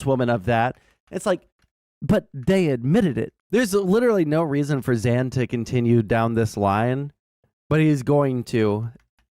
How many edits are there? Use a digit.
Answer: 1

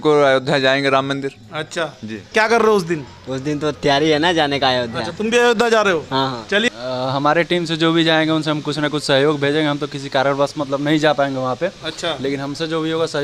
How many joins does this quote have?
2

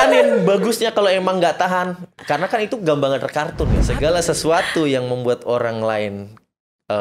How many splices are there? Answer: 1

